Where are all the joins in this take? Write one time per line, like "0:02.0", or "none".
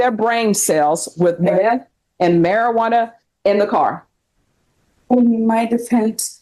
none